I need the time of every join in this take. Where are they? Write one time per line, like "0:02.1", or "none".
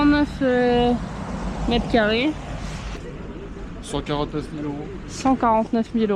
none